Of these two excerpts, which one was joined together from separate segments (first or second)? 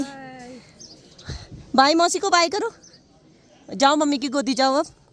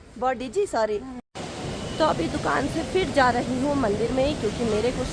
second